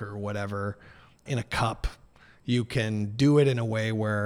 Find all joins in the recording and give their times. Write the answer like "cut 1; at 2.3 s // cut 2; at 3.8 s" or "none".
cut 1; at 1.2 s